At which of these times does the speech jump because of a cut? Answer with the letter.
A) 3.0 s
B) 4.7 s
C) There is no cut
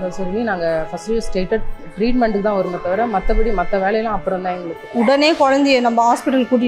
B